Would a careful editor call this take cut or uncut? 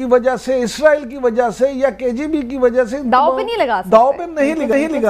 uncut